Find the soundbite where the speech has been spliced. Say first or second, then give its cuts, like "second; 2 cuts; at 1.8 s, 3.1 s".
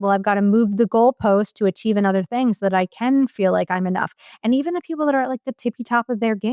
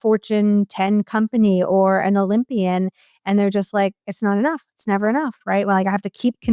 second; 1 cut; at 5.3 s